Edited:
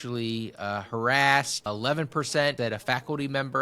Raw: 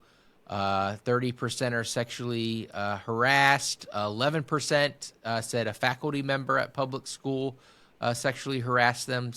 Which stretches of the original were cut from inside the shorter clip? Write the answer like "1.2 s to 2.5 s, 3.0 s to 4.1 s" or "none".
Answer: 3.8 s to 4.0 s, 4.9 s to 5.5 s